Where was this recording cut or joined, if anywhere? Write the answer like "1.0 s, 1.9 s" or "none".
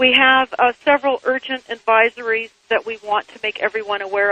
none